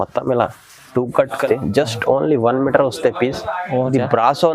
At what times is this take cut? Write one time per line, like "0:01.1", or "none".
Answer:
0:01.4

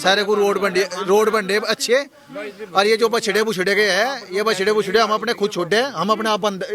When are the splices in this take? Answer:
none

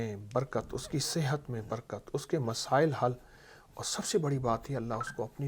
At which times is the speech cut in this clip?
none

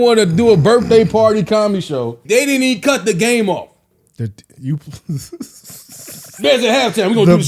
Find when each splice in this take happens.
0:02.2

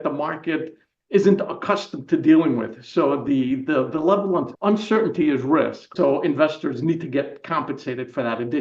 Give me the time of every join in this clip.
0:04.5
0:05.8

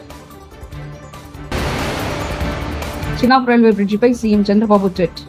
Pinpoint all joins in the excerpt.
none

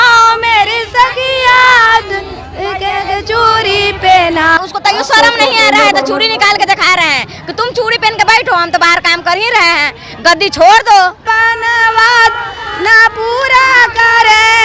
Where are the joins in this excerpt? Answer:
0:04.6
0:11.2

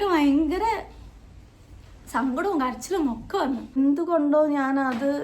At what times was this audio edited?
0:03.8

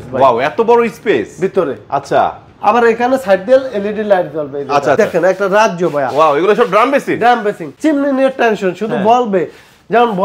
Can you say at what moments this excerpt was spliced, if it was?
0:05.0
0:07.7

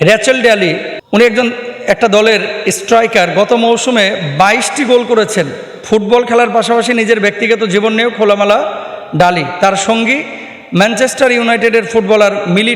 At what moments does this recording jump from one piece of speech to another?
0:00.9

